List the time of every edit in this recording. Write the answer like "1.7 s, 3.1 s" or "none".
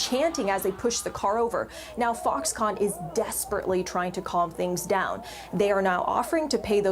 6.0 s

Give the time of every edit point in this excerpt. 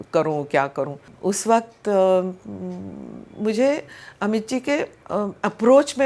1.1 s, 5.0 s

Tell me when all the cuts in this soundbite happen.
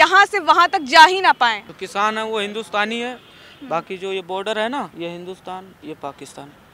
1.7 s, 4.9 s

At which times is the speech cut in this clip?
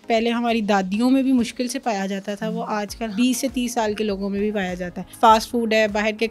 3.1 s, 5.0 s

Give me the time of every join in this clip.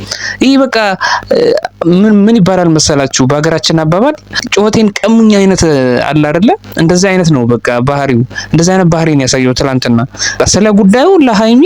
10.4 s

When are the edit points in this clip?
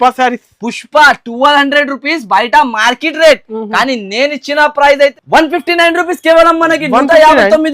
5.1 s

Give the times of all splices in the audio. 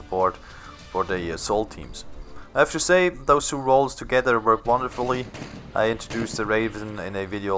1.3 s

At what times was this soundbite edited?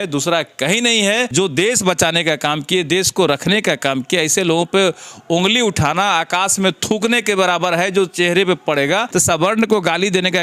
1.3 s, 9.1 s

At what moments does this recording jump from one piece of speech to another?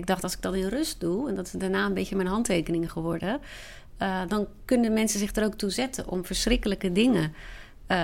none

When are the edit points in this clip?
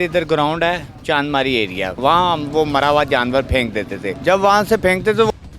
2.0 s, 4.0 s

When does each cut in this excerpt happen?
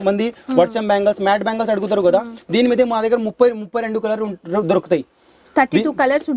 none

